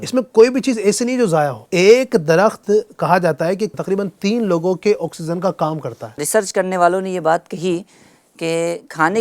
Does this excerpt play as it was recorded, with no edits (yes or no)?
no